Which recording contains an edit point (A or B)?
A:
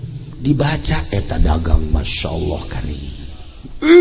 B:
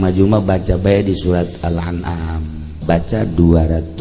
B